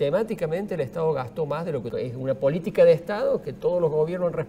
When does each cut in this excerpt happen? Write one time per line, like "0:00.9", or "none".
0:01.9